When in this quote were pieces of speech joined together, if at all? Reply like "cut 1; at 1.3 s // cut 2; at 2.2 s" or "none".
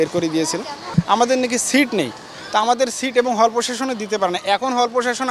cut 1; at 0.9 s